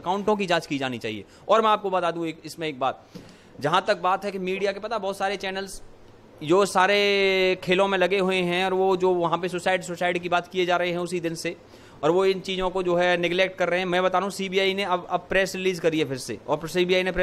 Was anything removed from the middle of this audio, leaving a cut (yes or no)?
no